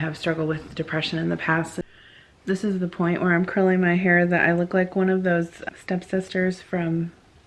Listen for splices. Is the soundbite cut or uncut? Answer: cut